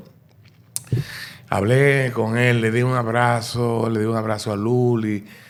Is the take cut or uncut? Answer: uncut